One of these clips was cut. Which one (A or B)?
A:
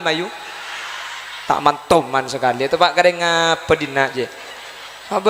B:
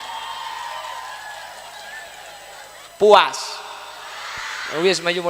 B